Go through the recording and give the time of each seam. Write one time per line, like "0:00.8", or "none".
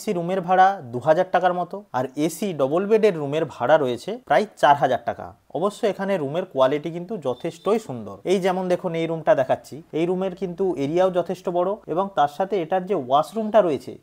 none